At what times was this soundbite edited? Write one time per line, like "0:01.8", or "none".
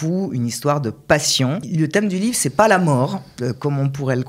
0:01.6